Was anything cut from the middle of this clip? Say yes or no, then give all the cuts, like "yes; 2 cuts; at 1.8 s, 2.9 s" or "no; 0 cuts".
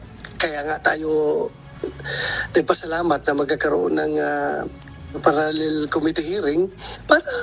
yes; 1 cut; at 5.2 s